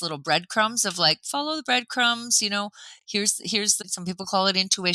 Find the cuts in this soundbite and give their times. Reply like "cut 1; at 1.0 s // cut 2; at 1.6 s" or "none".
cut 1; at 3.8 s